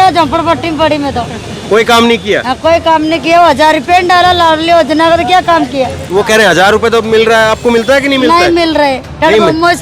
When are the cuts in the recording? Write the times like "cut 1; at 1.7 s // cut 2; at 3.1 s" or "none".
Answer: none